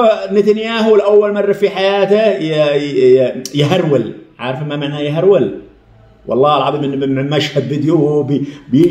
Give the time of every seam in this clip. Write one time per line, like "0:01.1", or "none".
none